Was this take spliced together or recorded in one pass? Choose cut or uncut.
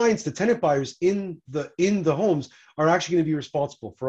uncut